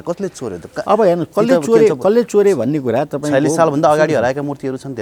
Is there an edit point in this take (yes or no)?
no